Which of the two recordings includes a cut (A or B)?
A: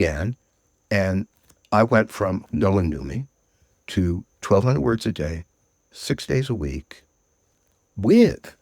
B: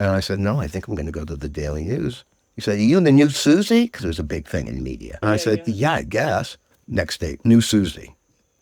A